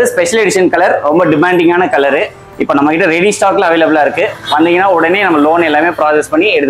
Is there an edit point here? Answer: no; 0 cuts

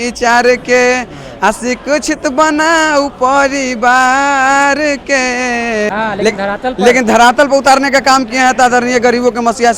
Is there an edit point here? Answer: yes; 1 cut; at 5.9 s

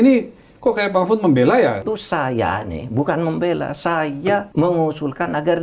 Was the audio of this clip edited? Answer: yes; 2 cuts; at 1.8 s, 4.5 s

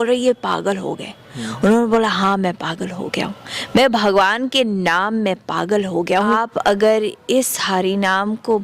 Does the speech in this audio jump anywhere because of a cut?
yes; 1 cut; at 6.3 s

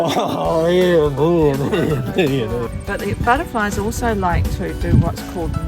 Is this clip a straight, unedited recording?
no; 1 cut; at 2.8 s

